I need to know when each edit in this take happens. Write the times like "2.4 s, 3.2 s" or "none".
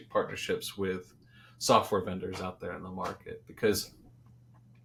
none